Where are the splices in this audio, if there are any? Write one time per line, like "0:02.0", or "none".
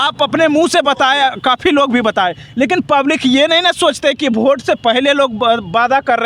none